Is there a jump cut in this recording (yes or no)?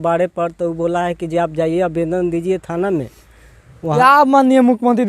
yes